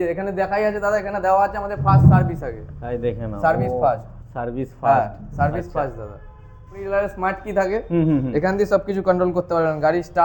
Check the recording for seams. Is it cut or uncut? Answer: cut